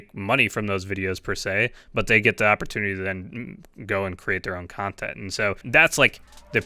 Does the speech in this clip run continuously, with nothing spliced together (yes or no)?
no